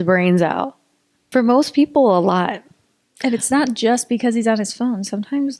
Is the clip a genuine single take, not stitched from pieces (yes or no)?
no